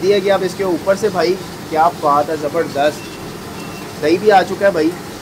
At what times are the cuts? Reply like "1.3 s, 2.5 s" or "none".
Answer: none